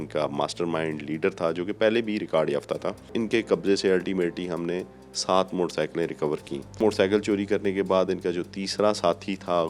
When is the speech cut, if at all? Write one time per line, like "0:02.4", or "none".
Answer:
0:03.1
0:06.8

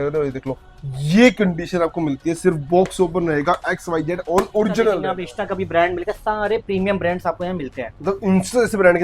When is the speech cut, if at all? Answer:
0:05.1

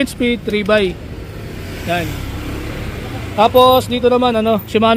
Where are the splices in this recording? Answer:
none

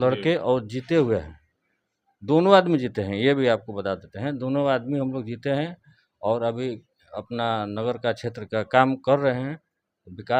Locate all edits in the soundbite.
none

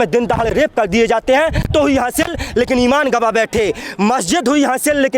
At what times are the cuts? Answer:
0:01.7

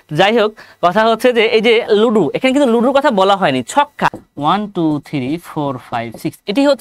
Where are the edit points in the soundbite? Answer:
0:04.2

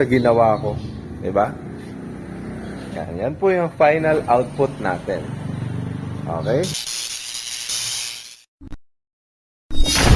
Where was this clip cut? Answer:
0:06.8

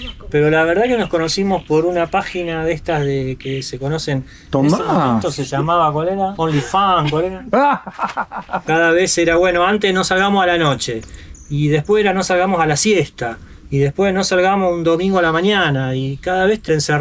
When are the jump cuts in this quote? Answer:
0:08.6

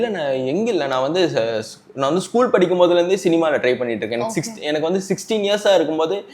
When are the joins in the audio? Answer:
none

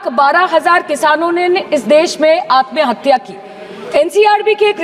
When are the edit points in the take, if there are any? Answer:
none

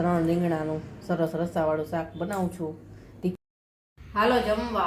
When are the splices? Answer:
0:03.4

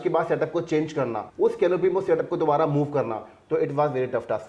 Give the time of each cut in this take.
0:01.2

